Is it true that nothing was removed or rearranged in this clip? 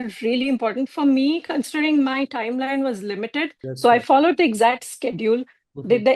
no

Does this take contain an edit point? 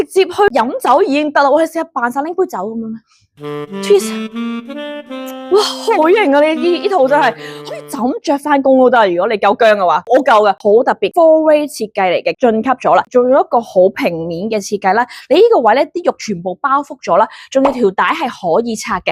no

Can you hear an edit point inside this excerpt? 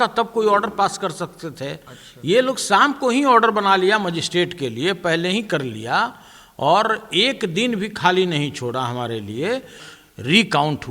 yes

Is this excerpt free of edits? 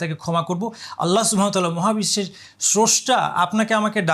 yes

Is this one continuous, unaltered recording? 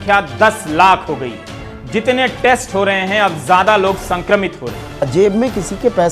no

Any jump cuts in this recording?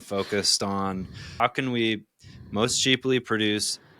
yes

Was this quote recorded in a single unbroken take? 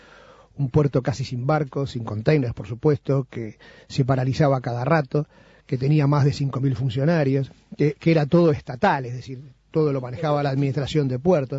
no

